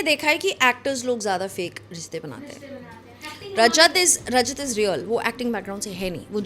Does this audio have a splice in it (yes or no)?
no